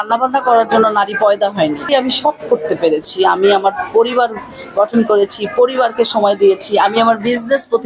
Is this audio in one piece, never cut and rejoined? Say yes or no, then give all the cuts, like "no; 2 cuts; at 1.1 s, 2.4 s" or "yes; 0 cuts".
no; 1 cut; at 1.9 s